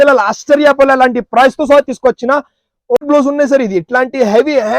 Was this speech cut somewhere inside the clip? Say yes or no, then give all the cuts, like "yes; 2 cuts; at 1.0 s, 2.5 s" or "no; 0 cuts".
yes; 1 cut; at 3.0 s